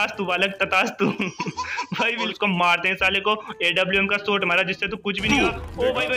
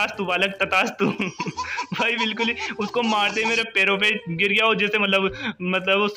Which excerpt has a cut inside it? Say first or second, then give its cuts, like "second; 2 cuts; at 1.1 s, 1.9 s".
first; 1 cut; at 2.3 s